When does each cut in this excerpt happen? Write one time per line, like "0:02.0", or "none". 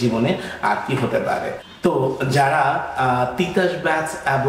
none